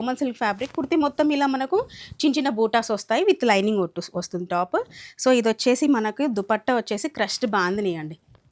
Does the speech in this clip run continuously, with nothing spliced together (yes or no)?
yes